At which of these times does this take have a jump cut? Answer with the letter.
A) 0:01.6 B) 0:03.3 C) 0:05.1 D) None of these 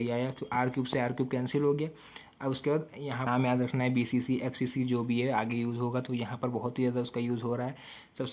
B